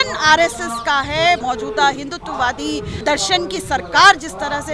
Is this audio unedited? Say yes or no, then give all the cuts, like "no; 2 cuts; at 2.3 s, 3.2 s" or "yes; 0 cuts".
no; 2 cuts; at 1.4 s, 3.0 s